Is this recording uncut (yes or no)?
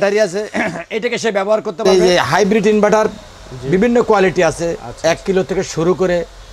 no